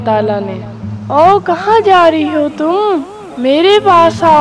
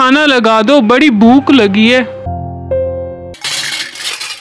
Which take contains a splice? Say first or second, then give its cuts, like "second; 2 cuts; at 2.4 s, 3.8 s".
second; 2 cuts; at 2.2 s, 3.4 s